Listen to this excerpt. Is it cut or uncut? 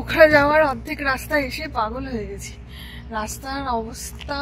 uncut